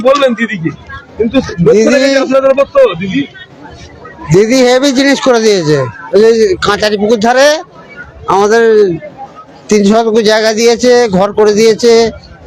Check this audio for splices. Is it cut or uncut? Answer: uncut